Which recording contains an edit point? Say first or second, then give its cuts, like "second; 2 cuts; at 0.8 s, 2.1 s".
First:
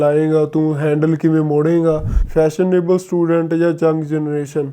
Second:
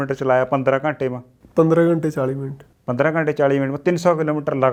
first; 1 cut; at 2.1 s